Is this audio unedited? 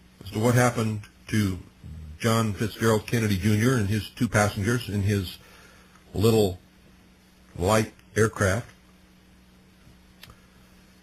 no; 1 cut; at 3.1 s

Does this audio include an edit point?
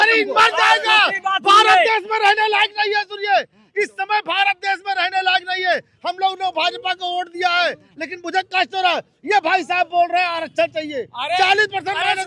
no; 0 cuts

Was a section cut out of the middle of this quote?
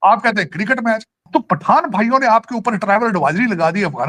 yes; 1 cut; at 1.3 s

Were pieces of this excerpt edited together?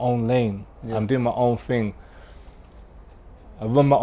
no; 0 cuts

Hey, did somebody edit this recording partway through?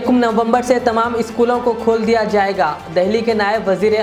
no; 0 cuts

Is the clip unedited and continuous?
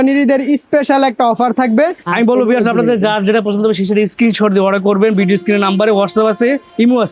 no; 1 cut; at 2.0 s

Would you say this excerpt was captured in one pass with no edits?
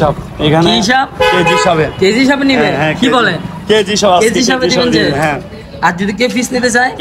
yes; 0 cuts

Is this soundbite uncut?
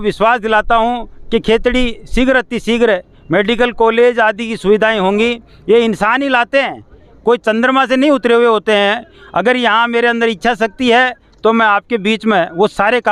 yes; 0 cuts

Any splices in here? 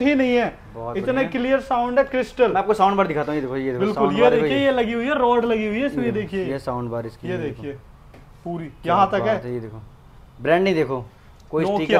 no; 0 cuts

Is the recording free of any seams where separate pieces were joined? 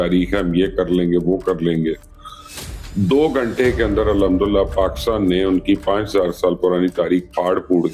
yes; 0 cuts

